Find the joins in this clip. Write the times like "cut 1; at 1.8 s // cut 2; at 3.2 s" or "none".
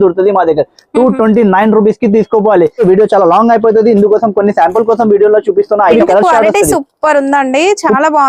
cut 1; at 2.8 s // cut 2; at 5.9 s